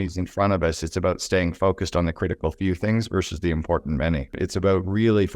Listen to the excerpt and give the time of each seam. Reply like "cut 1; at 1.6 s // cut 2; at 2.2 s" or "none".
cut 1; at 4.3 s